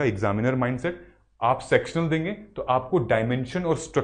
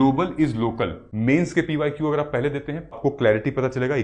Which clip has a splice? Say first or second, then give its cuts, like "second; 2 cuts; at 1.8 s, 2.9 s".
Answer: second; 2 cuts; at 1.0 s, 2.9 s